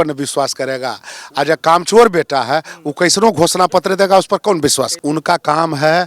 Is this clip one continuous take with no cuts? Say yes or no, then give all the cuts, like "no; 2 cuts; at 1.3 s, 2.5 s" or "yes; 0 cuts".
no; 1 cut; at 5.0 s